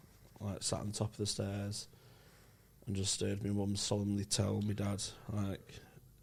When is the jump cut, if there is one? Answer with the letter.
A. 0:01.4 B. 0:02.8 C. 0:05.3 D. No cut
D